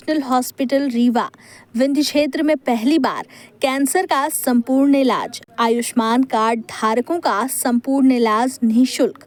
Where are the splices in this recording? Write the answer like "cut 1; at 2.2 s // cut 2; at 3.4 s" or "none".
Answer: none

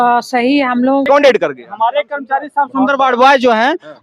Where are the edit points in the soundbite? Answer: cut 1; at 1.1 s

